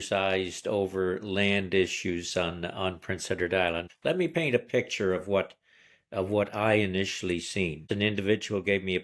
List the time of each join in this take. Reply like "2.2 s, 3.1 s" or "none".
3.9 s, 7.9 s